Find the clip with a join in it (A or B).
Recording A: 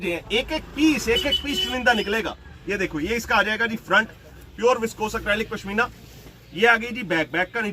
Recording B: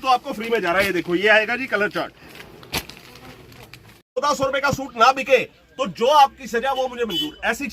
B